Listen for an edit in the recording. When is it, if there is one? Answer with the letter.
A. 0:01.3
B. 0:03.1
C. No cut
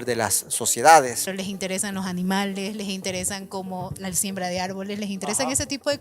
A